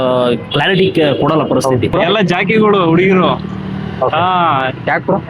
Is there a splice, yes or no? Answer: yes